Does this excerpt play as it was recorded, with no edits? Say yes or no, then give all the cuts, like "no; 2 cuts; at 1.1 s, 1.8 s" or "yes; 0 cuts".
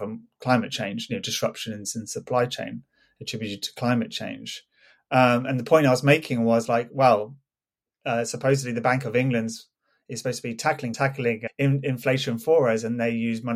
yes; 0 cuts